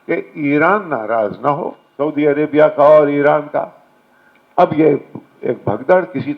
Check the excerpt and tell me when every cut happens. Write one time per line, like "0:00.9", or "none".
0:01.8